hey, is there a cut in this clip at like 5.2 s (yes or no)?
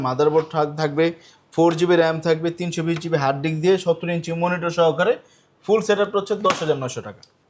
no